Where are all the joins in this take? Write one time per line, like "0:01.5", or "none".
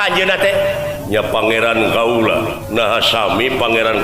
0:01.0
0:02.6